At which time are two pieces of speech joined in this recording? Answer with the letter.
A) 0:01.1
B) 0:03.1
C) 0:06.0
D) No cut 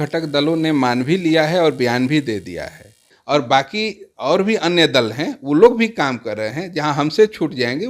B